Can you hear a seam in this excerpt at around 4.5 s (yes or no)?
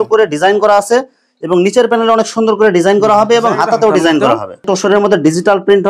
yes